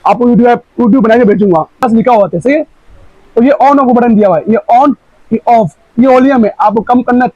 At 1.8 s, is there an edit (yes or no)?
yes